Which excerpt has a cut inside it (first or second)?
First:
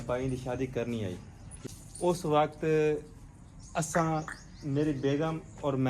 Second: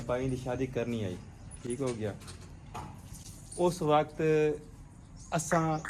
first